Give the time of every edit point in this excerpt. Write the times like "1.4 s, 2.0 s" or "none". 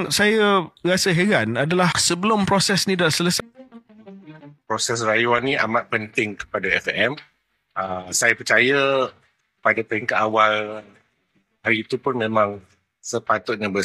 3.4 s